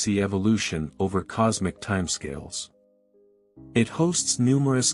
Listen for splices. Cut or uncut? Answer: uncut